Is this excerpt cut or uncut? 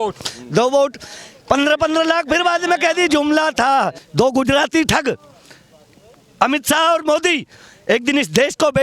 cut